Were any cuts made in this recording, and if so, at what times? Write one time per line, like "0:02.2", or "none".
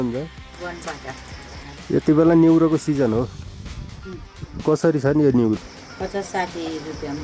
none

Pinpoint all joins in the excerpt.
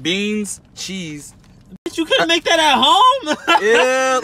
none

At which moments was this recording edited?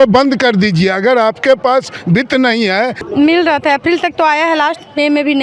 0:03.0

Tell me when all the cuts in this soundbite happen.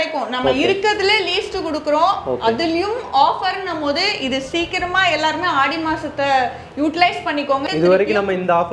0:07.6

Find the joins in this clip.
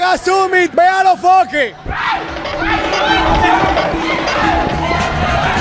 none

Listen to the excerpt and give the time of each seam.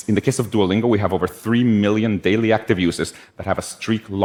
none

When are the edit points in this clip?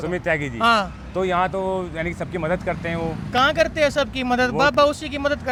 none

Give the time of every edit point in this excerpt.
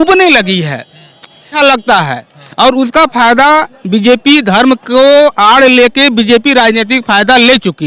0:01.5

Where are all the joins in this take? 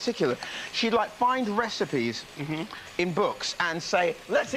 0:02.2

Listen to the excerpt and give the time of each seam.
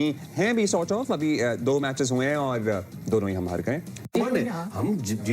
0:04.0

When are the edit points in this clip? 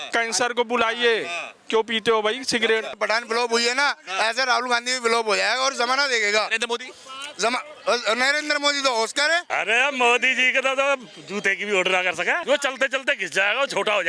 0:02.9
0:09.5
0:12.4

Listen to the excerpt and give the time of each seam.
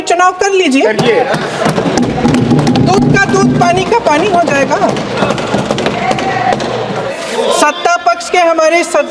0:07.1

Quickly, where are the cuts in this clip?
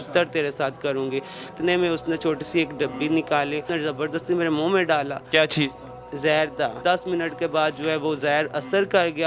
0:01.5
0:03.7
0:06.8

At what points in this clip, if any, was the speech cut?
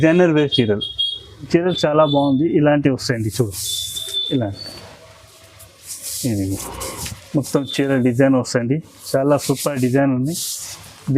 0:01.4

